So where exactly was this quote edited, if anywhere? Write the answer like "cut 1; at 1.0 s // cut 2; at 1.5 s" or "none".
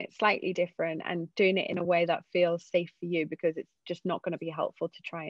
none